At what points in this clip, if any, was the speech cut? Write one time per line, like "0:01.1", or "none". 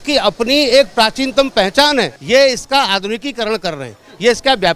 0:02.2